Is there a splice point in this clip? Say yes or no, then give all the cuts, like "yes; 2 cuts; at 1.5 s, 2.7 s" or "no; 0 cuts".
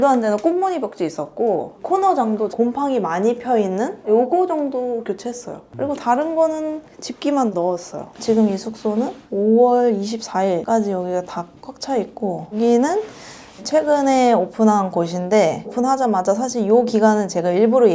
yes; 1 cut; at 8.2 s